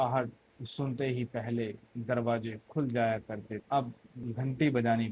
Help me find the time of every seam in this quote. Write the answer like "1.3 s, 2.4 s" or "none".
3.6 s, 4.1 s

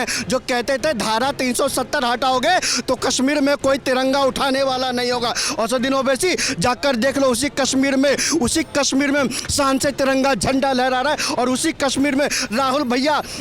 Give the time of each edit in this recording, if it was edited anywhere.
none

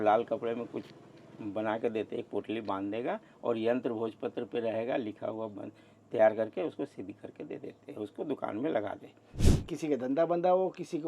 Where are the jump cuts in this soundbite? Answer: 9.4 s

